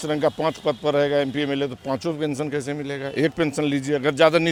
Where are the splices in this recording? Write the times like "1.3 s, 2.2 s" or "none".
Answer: none